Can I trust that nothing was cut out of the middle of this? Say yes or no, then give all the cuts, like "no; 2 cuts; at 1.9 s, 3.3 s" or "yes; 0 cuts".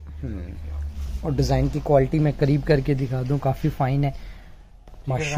yes; 0 cuts